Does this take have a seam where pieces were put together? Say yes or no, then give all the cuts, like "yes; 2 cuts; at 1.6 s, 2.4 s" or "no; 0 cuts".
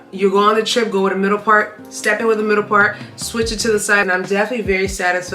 yes; 1 cut; at 4.0 s